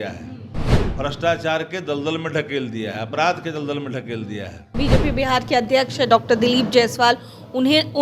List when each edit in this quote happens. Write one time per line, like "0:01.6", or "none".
0:04.7